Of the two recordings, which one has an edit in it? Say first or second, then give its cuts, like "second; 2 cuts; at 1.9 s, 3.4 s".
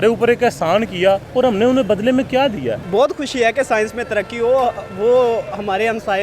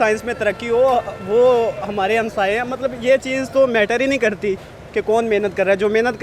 first; 2 cuts; at 1.3 s, 2.8 s